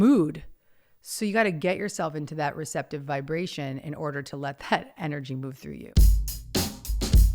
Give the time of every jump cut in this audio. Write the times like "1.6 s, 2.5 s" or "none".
5.9 s